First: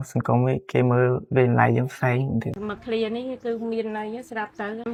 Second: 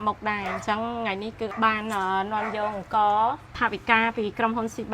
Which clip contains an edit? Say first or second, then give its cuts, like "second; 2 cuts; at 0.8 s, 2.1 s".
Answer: second; 2 cuts; at 1.5 s, 3.5 s